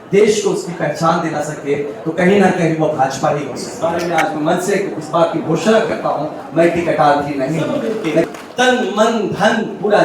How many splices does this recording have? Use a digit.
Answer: 2